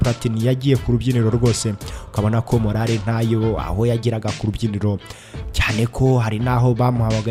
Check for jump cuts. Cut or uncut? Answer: uncut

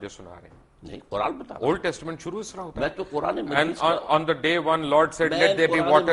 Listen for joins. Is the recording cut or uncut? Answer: uncut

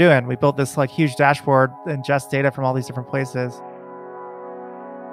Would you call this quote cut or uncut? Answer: uncut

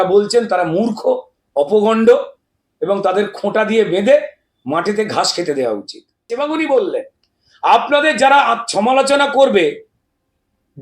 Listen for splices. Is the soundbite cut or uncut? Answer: cut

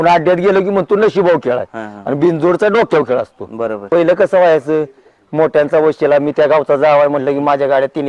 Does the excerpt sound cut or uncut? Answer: cut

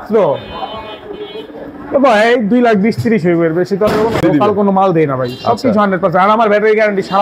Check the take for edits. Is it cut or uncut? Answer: cut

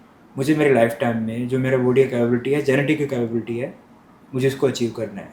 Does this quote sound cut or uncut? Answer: uncut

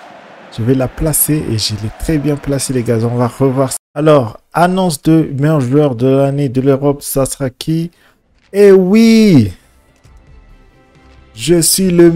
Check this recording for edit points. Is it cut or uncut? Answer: cut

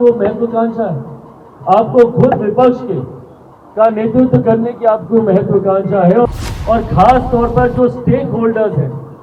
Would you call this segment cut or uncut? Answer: cut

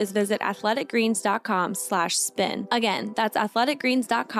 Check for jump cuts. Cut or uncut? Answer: uncut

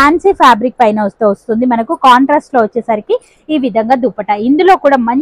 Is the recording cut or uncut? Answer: uncut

